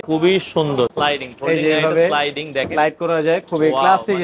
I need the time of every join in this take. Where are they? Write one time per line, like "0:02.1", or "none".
0:00.9

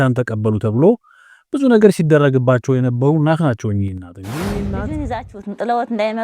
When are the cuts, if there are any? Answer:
0:04.6

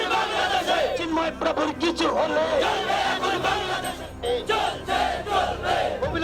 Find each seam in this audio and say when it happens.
none

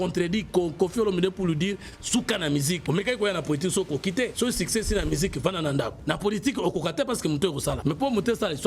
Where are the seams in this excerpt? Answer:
0:02.8
0:04.3
0:06.0
0:07.8

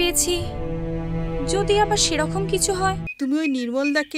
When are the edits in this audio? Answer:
0:03.1

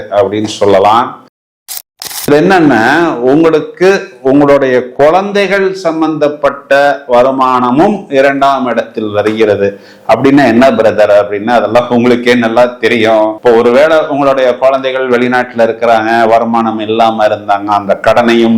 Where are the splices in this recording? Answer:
0:01.8

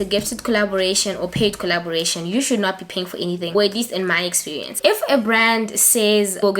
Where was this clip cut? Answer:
none

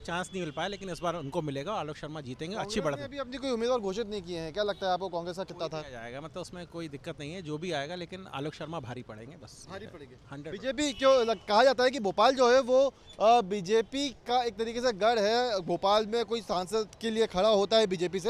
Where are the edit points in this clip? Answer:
none

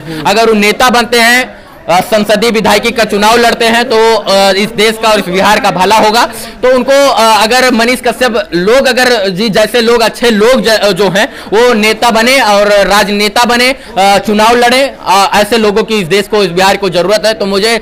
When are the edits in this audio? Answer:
none

